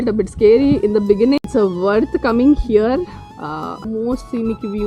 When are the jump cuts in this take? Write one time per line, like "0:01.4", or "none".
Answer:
0:01.4
0:03.8